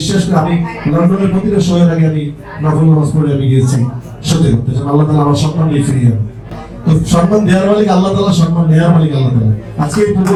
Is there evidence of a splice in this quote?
no; 0 cuts

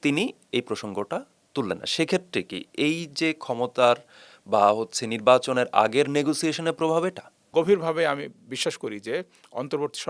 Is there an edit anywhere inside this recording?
yes; 1 cut; at 7.5 s

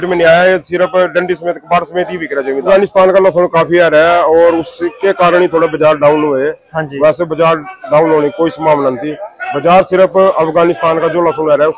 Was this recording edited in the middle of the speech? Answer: yes; 1 cut; at 2.6 s

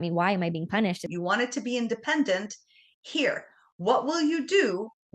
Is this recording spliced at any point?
yes; 1 cut; at 1.0 s

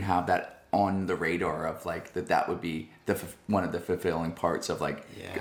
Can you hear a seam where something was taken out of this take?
no; 0 cuts

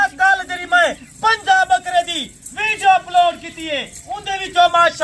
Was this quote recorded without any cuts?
yes; 0 cuts

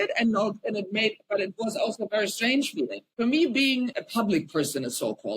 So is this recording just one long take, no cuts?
no; 2 cuts; at 3.0 s, 3.9 s

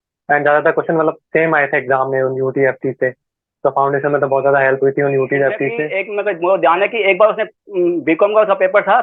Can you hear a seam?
yes; 1 cut; at 6.0 s

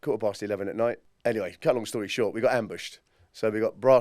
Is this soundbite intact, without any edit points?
no; 1 cut; at 1.1 s

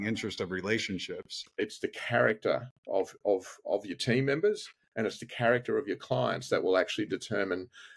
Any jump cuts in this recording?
yes; 1 cut; at 1.3 s

